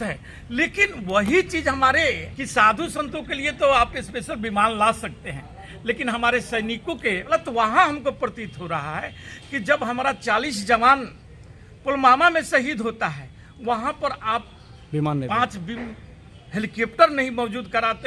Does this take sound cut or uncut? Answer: cut